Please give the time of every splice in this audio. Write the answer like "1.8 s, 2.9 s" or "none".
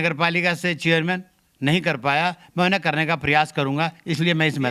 none